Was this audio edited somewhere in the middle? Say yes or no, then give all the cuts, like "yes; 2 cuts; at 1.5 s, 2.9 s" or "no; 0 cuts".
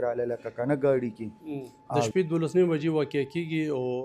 yes; 1 cut; at 2.1 s